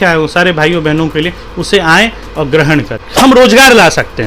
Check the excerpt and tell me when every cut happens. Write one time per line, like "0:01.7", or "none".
0:03.0